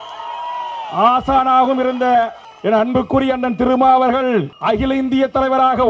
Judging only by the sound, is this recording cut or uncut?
cut